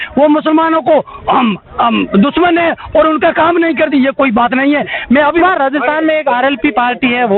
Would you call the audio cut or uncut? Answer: cut